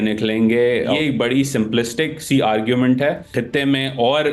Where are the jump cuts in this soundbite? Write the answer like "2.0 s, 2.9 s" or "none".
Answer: 0.9 s, 3.3 s